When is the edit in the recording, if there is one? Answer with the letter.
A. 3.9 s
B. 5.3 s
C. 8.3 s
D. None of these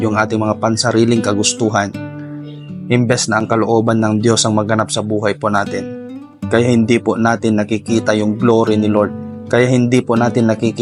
D